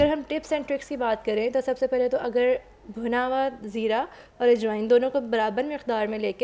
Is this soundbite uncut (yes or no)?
yes